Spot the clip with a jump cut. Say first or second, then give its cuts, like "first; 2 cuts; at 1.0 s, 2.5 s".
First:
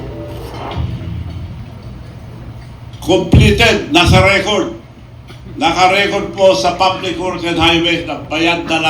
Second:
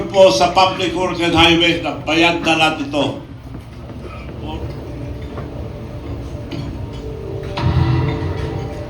second; 1 cut; at 4.1 s